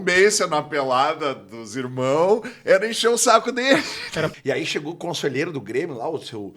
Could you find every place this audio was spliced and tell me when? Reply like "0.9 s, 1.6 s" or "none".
4.3 s